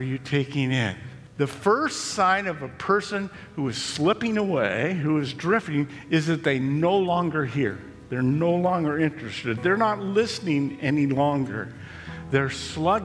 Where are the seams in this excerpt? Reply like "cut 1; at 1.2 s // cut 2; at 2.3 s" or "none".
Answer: cut 1; at 1.2 s

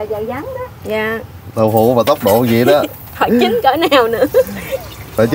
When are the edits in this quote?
cut 1; at 1.5 s

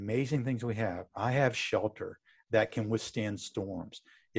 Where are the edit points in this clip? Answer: none

